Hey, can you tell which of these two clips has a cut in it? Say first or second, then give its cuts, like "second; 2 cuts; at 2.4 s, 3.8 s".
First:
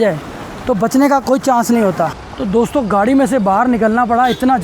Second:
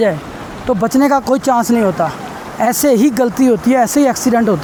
first; 1 cut; at 2.3 s